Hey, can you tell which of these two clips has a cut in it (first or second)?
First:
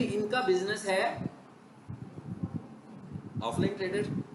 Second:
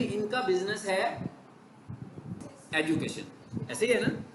second